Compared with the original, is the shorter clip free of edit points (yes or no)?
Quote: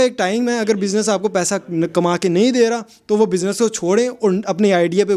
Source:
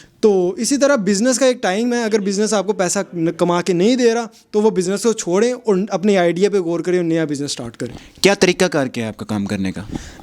yes